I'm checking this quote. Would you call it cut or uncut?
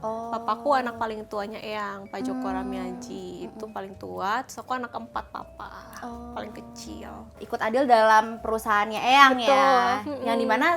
cut